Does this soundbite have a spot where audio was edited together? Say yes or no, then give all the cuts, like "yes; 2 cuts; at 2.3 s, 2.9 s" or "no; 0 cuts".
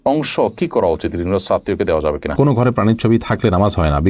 yes; 1 cut; at 2.3 s